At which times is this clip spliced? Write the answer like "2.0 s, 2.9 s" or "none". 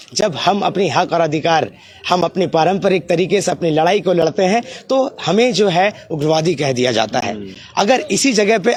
none